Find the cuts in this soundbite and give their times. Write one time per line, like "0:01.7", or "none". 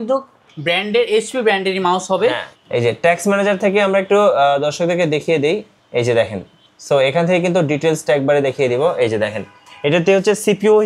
0:02.5
0:05.8

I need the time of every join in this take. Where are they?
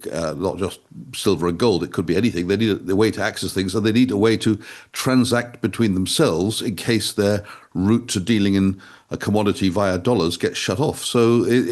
none

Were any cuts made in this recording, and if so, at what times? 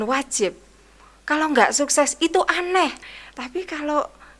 0:03.1

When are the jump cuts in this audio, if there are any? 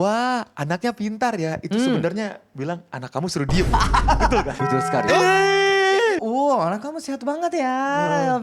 0:04.6
0:06.2

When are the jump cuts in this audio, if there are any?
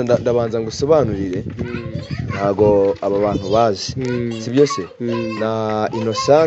none

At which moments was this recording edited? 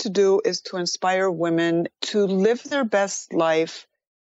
0:01.9
0:02.7

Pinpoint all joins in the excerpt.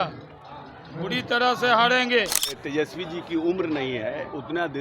0:02.6

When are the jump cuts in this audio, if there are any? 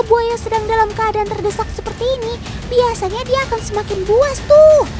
none

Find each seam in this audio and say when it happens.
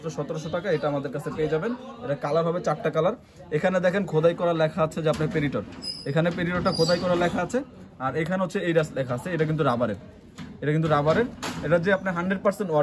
none

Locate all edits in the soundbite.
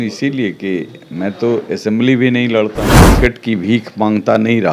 0:03.0

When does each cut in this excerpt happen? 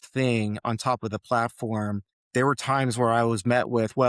0:02.1

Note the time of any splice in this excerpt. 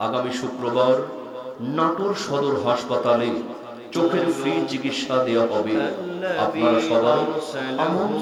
none

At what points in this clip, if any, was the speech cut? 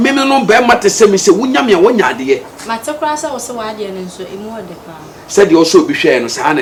none

